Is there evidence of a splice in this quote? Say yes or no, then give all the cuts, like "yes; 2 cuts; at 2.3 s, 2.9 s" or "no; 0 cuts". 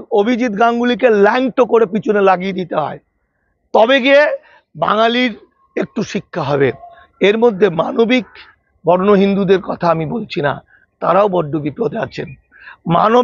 no; 0 cuts